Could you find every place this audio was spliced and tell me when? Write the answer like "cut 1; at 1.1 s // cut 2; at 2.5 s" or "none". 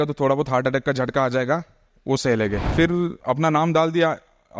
cut 1; at 3.1 s